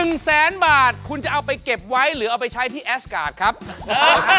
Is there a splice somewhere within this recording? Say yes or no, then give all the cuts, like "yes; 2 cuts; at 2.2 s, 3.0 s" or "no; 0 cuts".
no; 0 cuts